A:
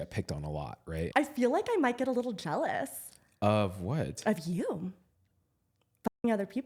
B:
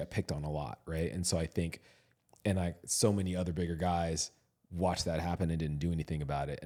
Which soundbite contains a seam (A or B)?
A